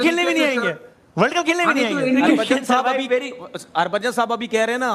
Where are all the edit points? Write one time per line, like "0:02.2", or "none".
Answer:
0:02.4